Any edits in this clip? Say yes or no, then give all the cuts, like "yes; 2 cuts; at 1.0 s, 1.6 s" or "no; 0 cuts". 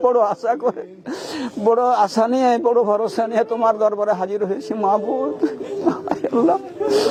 no; 0 cuts